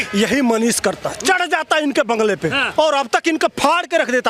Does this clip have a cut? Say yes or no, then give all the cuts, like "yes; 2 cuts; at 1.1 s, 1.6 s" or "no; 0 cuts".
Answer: yes; 1 cut; at 2.6 s